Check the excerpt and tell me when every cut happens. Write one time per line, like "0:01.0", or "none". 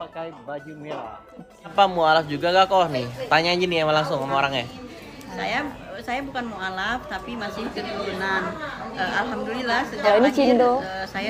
0:01.7